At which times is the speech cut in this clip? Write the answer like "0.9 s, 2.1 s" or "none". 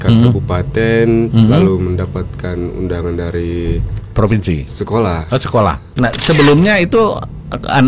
5.8 s